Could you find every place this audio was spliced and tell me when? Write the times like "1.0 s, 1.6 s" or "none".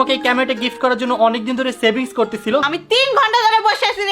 2.7 s